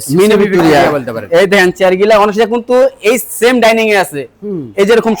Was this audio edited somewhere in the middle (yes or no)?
no